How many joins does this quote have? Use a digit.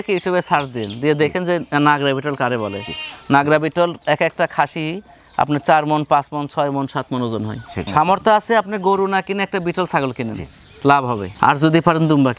1